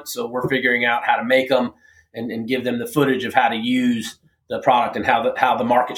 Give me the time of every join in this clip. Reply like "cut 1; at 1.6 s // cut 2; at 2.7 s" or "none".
none